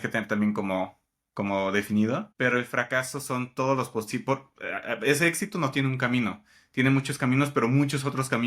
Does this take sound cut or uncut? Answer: cut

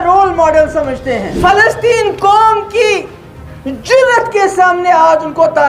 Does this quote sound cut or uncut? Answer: cut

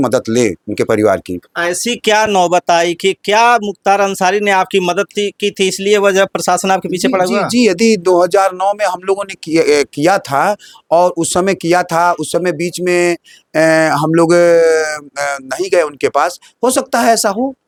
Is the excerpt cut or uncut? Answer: uncut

